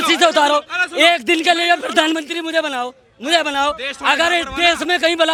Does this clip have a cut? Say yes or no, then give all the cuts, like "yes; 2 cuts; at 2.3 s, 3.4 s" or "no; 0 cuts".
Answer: no; 0 cuts